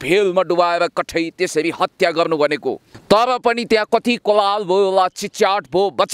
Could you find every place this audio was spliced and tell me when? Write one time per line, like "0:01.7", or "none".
0:02.9